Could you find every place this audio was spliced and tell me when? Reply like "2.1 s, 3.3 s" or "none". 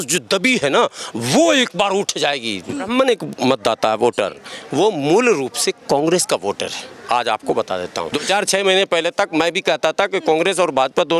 2.9 s, 8.2 s